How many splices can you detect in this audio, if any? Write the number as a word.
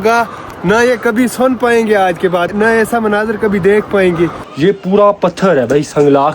two